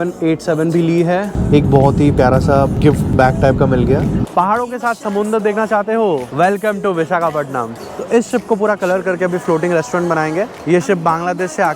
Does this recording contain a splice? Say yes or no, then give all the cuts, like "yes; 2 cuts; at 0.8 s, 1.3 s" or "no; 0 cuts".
yes; 5 cuts; at 1.4 s, 2.8 s, 4.3 s, 6.3 s, 7.8 s